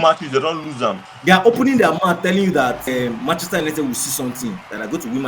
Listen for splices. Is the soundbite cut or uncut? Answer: cut